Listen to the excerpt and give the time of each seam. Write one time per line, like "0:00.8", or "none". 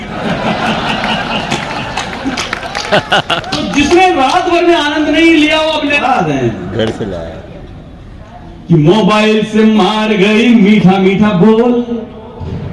0:06.0